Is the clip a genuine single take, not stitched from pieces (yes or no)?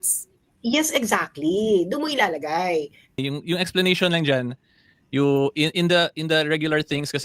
no